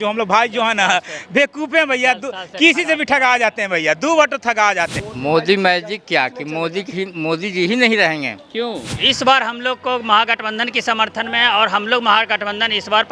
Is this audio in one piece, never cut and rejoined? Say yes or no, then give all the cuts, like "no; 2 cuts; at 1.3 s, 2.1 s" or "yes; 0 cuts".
no; 2 cuts; at 5.0 s, 9.0 s